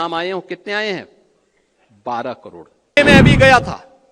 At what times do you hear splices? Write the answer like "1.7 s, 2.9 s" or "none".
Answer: 3.0 s